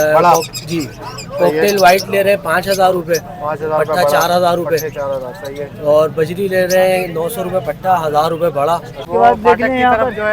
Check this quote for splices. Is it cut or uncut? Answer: cut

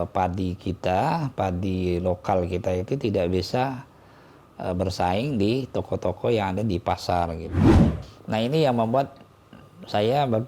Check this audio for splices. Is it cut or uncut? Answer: cut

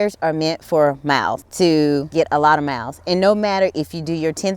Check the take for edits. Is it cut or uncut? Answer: cut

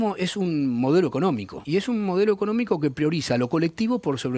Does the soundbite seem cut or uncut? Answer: cut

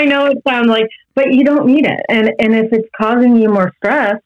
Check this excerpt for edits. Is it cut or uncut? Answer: uncut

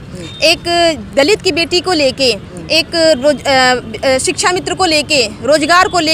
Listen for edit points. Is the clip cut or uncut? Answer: uncut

